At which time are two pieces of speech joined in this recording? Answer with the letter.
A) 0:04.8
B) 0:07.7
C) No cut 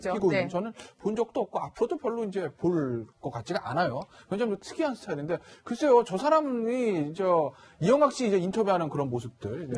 B